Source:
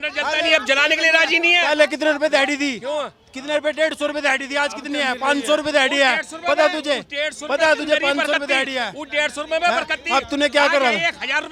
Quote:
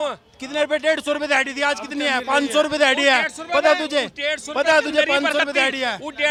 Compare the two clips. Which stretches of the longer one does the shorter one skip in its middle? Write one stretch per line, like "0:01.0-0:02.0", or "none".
none